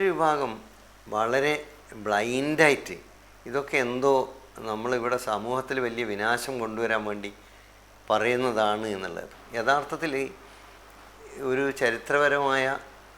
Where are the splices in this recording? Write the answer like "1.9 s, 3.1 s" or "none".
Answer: 9.3 s